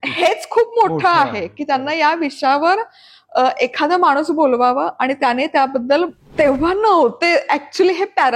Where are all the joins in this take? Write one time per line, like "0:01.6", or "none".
0:06.2